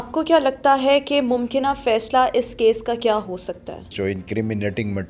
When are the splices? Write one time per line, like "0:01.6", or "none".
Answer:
0:03.9

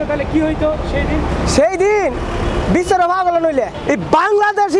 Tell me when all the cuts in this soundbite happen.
0:03.8

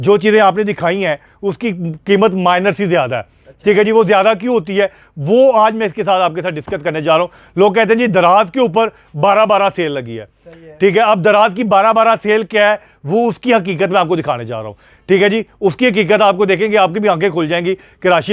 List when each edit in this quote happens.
none

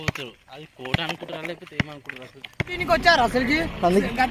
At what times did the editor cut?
0:02.8

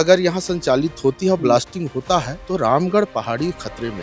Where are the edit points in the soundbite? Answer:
0:02.4

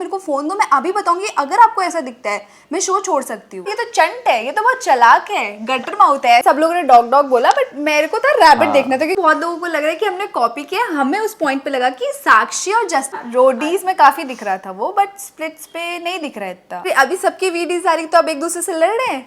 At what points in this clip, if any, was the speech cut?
0:03.7
0:06.4
0:09.2
0:13.1
0:16.8

